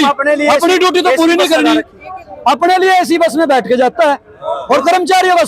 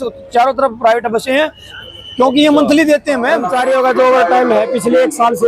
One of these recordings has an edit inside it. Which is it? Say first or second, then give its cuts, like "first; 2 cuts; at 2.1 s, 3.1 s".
second; 1 cut; at 3.6 s